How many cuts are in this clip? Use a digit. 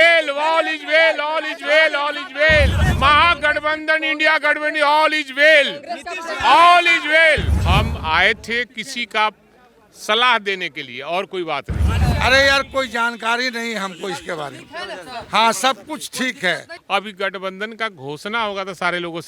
4